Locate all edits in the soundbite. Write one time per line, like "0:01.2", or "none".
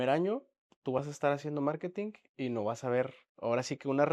0:02.2
0:03.2